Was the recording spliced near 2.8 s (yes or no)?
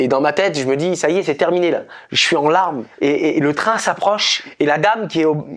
yes